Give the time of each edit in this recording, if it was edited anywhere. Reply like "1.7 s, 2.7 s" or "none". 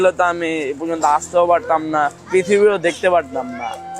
2.2 s